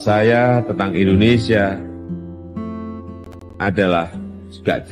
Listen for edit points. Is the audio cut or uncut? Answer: uncut